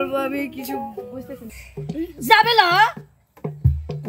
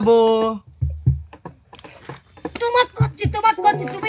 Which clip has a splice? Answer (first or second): first